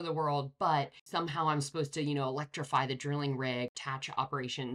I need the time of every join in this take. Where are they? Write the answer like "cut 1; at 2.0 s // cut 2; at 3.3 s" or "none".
cut 1; at 1.0 s // cut 2; at 3.7 s